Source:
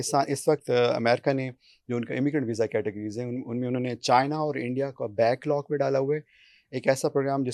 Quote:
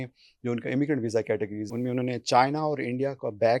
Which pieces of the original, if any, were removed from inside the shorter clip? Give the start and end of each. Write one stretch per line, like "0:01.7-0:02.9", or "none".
0:03.1-0:03.4